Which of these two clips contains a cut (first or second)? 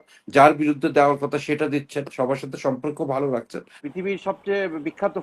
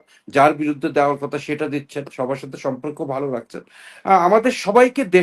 first